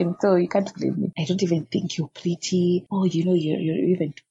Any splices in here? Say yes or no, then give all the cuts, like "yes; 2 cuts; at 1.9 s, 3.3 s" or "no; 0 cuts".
yes; 2 cuts; at 1.2 s, 2.9 s